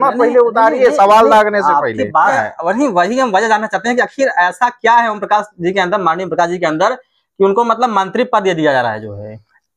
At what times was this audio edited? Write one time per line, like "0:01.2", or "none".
0:02.3